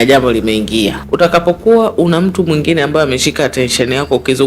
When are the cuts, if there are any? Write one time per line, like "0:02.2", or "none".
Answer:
0:01.0